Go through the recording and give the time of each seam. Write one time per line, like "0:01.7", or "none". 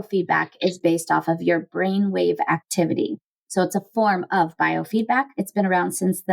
0:05.4